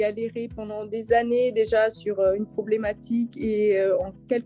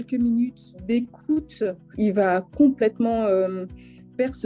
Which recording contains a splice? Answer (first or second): second